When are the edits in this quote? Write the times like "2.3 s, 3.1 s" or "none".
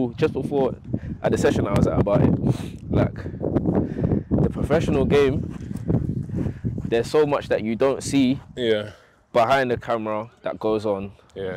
none